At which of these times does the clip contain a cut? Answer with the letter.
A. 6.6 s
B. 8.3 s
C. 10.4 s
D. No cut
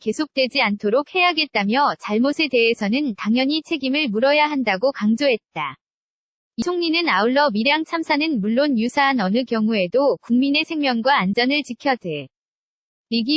A